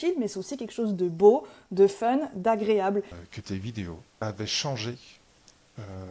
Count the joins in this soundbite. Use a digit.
2